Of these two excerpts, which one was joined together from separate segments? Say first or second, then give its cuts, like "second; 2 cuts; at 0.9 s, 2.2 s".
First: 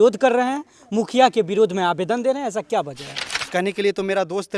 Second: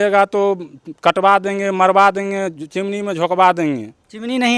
first; 1 cut; at 3.4 s